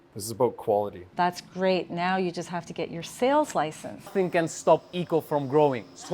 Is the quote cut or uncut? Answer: cut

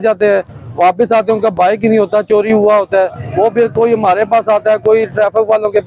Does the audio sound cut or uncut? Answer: uncut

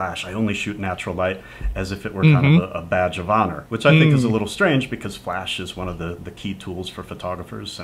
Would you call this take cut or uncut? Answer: cut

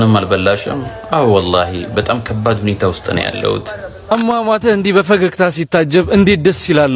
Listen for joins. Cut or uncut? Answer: cut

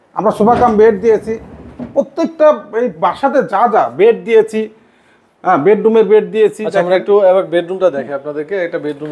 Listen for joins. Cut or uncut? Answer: uncut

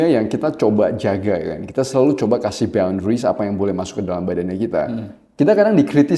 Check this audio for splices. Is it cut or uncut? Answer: uncut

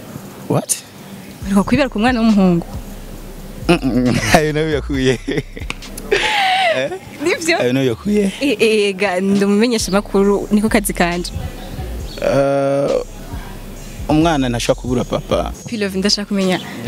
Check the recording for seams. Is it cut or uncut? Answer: cut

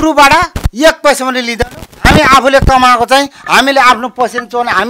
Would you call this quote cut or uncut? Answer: uncut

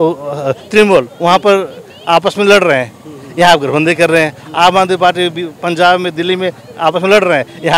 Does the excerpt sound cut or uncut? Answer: uncut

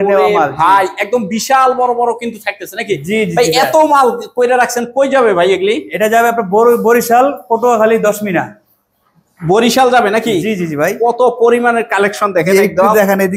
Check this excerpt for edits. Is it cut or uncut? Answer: uncut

